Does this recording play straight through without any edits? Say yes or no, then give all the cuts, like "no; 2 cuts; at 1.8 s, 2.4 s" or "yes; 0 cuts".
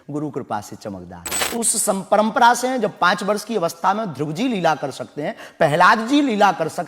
no; 1 cut; at 1.5 s